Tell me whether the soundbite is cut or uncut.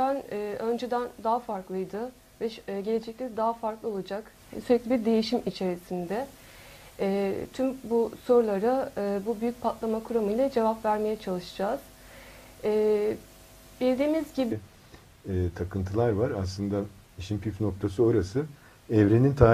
uncut